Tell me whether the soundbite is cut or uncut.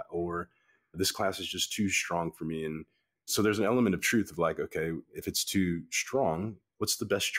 cut